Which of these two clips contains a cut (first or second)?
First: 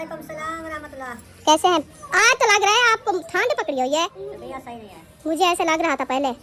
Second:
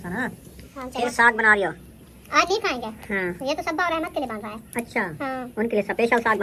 first